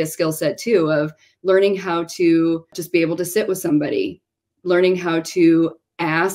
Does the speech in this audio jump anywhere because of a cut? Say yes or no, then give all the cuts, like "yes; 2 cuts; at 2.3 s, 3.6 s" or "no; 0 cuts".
yes; 1 cut; at 2.7 s